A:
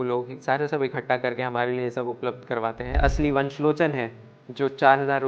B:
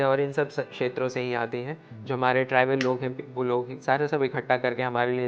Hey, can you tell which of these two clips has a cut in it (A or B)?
A